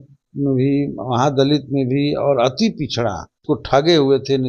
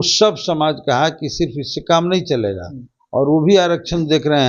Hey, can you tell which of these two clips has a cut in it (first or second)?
first